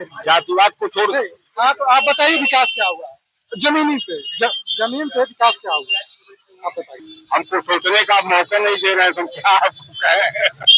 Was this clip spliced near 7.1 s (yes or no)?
yes